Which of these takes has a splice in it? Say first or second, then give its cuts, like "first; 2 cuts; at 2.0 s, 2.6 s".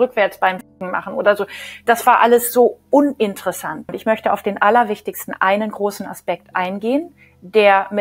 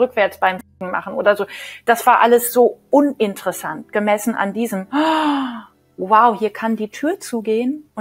first; 1 cut; at 3.9 s